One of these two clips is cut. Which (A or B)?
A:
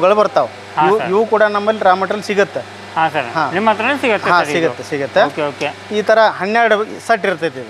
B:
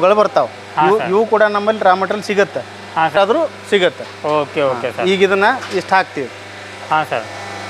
B